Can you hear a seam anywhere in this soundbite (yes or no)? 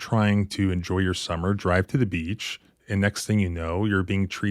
no